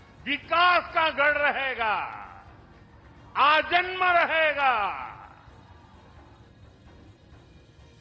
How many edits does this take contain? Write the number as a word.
one